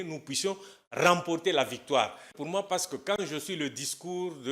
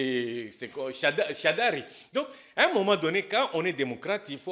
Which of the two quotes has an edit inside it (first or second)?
first